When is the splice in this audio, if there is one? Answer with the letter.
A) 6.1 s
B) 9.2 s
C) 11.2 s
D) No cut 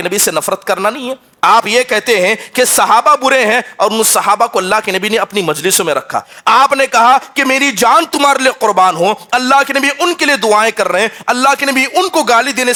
D